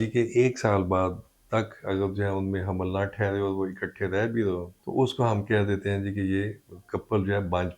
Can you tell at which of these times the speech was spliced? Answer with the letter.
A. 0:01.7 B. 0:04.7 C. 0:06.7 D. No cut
B